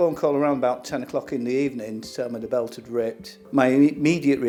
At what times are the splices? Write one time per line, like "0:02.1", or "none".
none